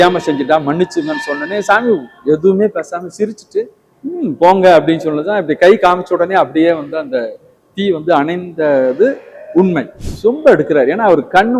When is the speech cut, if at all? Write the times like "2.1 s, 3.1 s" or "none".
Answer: 3.8 s, 10.0 s